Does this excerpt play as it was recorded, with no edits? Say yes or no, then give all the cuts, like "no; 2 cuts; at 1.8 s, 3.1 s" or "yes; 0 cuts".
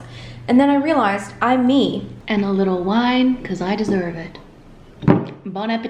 no; 2 cuts; at 2.1 s, 4.8 s